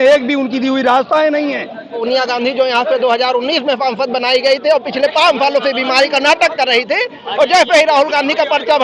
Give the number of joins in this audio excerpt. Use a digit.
1